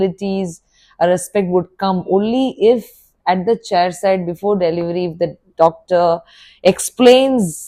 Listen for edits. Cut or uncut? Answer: uncut